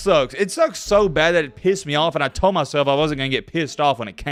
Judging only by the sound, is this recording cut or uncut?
uncut